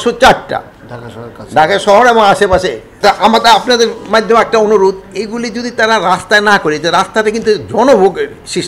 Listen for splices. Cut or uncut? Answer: cut